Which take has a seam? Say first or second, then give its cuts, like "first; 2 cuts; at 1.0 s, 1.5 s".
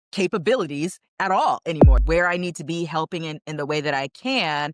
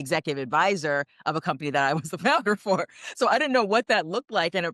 first; 1 cut; at 1.9 s